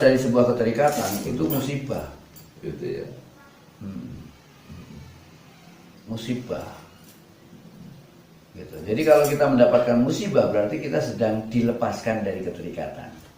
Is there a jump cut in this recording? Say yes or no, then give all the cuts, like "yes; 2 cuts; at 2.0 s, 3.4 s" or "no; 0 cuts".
no; 0 cuts